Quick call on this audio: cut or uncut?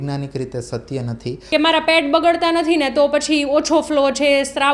cut